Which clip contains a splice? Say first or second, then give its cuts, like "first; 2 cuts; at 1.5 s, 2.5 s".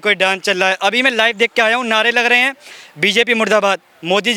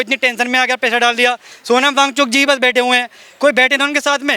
second; 1 cut; at 1.5 s